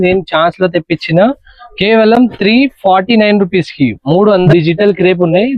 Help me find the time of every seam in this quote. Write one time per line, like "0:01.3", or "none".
0:04.5